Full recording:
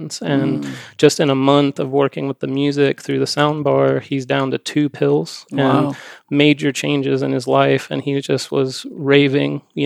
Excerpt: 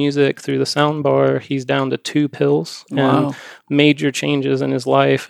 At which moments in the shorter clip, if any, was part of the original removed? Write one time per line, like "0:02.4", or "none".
none